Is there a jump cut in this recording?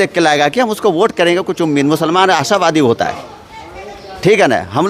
no; 0 cuts

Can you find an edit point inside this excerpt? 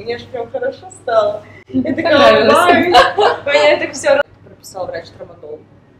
yes; 1 cut; at 4.3 s

